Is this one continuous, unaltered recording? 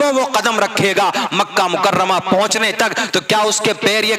yes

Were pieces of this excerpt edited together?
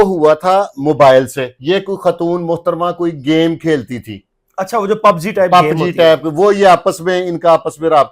no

